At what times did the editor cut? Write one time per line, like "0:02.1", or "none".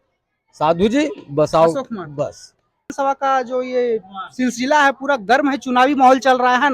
0:02.9

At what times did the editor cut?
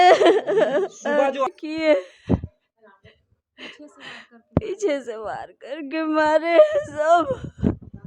0:01.5

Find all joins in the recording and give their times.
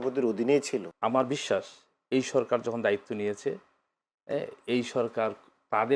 0:00.9

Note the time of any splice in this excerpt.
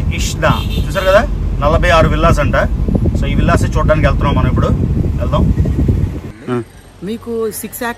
0:06.3

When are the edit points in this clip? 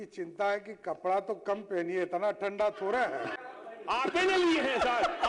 0:03.3

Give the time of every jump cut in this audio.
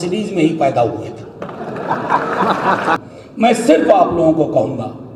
0:03.0

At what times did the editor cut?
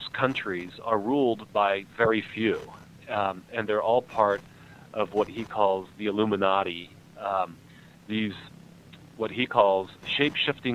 none

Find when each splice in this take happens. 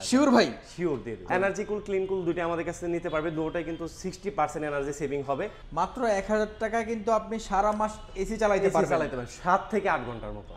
0:01.1
0:05.6

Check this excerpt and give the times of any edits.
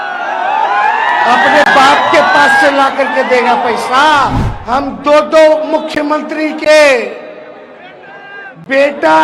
0:04.5

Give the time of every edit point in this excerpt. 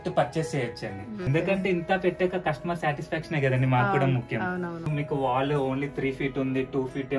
0:01.3
0:04.8

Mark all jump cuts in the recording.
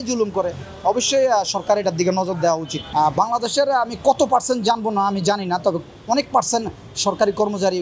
0:02.8

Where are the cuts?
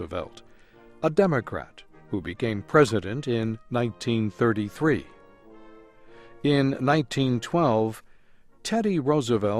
0:06.2

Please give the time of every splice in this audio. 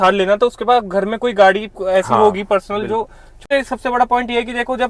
0:03.4

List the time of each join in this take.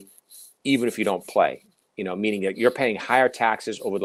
none

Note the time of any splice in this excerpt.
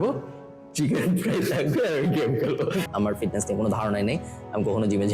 0:02.9

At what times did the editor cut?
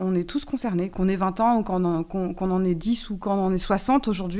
0:00.9

